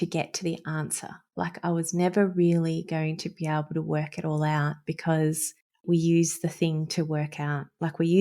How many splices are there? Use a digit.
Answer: 1